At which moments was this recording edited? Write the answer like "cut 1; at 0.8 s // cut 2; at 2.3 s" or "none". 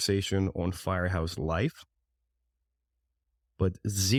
none